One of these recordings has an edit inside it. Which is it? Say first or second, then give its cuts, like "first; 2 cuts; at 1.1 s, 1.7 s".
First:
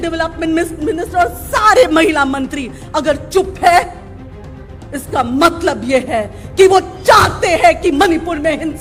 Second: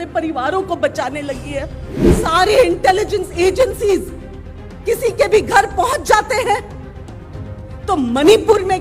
second; 1 cut; at 2.1 s